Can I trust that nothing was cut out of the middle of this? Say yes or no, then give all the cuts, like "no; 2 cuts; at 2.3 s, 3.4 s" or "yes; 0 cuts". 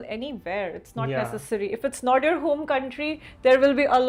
yes; 0 cuts